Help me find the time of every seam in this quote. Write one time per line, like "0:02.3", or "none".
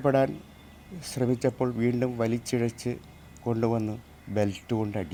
none